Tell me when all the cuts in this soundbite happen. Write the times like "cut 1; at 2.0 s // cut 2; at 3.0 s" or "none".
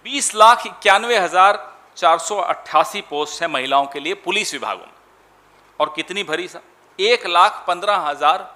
none